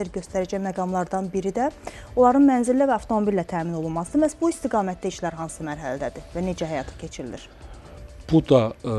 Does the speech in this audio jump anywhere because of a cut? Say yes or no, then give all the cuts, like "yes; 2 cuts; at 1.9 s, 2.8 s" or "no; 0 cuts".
no; 0 cuts